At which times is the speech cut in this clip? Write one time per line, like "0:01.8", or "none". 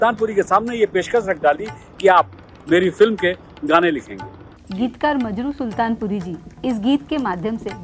0:04.7

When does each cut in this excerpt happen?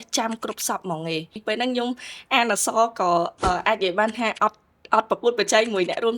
0:01.4

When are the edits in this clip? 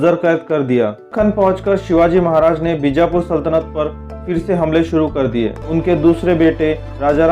0:01.0
0:05.6

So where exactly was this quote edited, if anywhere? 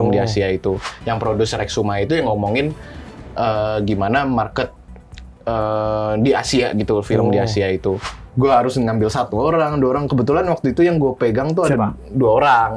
0:00.8
0:08.0

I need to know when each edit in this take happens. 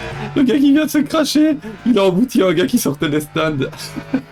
none

